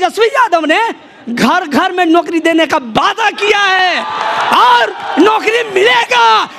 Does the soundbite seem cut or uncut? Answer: uncut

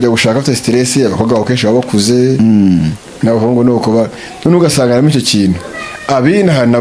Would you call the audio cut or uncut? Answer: uncut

